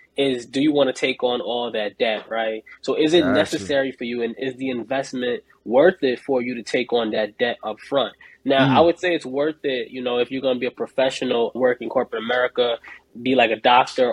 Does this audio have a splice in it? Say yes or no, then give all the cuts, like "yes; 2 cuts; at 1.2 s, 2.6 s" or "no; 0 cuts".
no; 0 cuts